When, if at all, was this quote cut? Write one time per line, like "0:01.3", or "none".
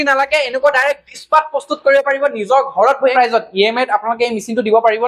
0:03.1